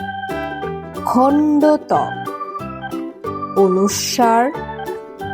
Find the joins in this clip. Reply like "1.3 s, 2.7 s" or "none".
1.0 s